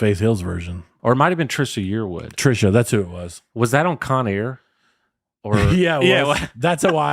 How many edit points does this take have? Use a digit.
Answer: 1